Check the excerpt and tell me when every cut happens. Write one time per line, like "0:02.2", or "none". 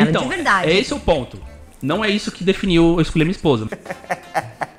0:03.7